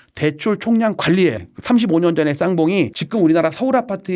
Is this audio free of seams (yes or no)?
no